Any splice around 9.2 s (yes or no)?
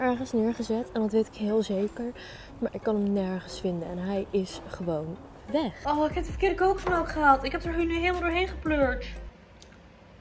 yes